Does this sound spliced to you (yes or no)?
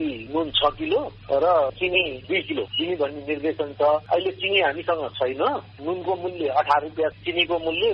yes